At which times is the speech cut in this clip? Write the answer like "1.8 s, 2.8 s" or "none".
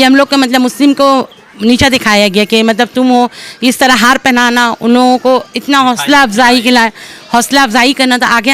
none